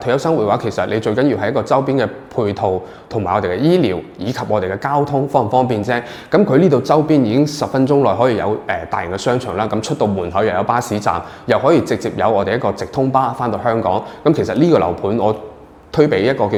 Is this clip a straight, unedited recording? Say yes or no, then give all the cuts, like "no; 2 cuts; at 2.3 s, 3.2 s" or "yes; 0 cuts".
yes; 0 cuts